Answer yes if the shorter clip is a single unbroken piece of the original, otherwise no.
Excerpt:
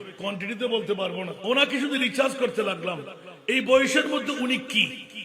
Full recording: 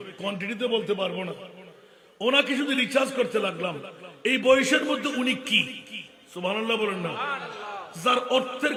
no